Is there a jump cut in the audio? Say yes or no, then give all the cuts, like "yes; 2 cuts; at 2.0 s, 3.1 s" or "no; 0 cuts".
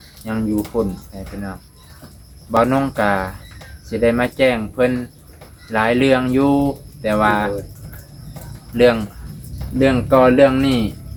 no; 0 cuts